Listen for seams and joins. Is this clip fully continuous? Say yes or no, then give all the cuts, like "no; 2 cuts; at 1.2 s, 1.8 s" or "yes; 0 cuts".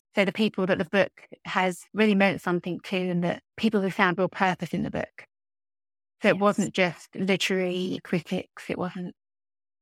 no; 1 cut; at 1.8 s